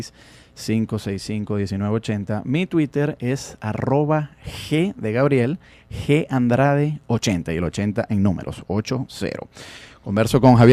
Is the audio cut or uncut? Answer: cut